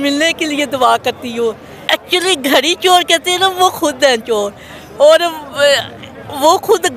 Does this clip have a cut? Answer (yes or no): yes